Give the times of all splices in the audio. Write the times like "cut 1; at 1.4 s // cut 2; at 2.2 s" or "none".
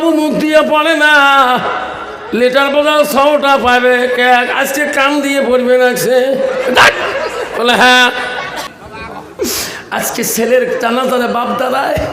cut 1; at 8.6 s